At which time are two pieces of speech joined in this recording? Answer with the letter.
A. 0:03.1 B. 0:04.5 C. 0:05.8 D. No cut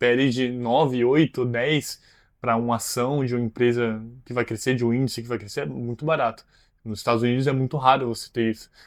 D